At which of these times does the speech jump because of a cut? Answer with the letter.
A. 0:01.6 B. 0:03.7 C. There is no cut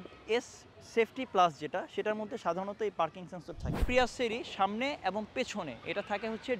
B